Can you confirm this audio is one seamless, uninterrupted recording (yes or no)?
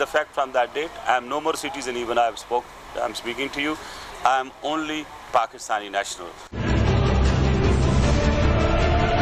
yes